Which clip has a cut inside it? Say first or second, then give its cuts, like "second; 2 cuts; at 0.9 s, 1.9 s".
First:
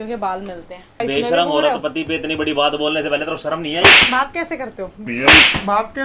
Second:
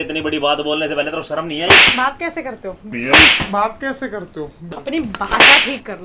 first; 1 cut; at 1.0 s